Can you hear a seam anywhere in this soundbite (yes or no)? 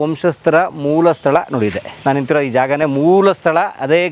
yes